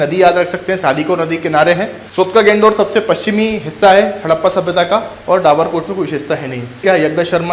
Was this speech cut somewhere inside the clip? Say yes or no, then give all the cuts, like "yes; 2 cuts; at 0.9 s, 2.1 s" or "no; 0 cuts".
yes; 2 cuts; at 2.0 s, 6.8 s